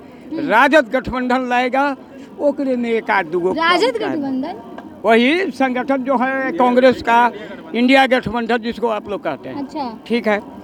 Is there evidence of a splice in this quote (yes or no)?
no